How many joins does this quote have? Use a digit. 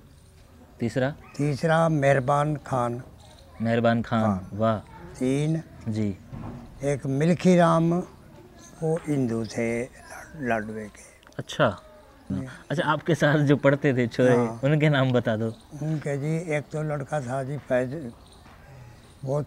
1